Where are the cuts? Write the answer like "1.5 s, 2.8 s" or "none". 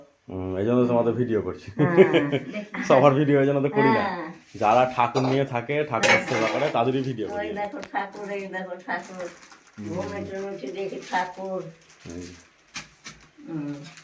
none